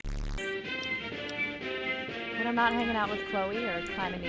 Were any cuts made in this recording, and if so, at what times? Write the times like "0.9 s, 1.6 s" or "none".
none